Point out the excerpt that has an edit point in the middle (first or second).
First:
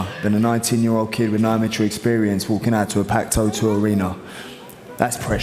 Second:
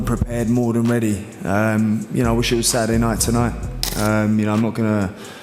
second